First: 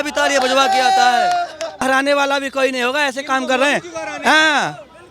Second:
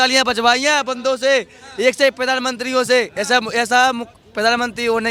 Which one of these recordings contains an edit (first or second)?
first